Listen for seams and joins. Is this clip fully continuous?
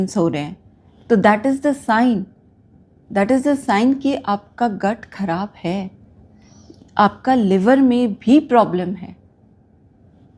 yes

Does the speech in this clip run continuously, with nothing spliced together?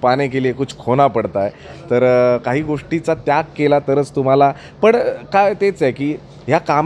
yes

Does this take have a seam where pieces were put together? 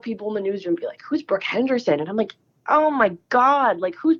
no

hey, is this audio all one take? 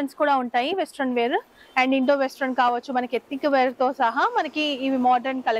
yes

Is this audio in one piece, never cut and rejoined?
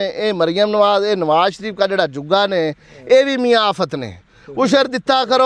yes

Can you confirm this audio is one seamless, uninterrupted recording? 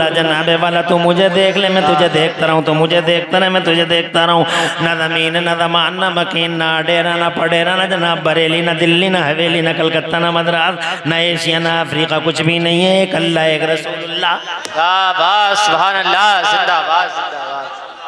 yes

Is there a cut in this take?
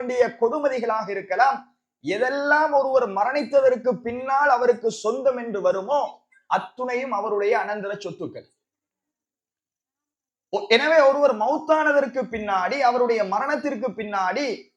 no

